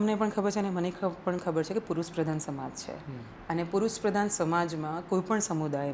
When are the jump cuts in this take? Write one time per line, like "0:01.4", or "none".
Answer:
none